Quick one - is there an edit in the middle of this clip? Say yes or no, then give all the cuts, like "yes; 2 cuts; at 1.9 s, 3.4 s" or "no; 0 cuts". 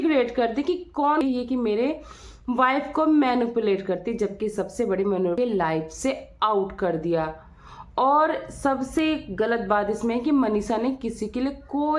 yes; 2 cuts; at 1.2 s, 5.4 s